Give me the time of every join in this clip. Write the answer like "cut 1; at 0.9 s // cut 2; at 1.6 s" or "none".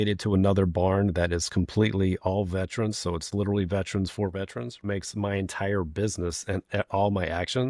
cut 1; at 4.8 s

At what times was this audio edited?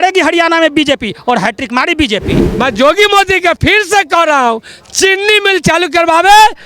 cut 1; at 2.5 s

